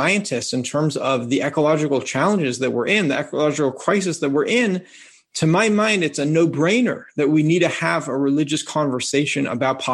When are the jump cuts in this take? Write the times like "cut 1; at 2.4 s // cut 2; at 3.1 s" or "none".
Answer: none